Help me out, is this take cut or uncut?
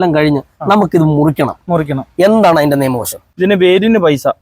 cut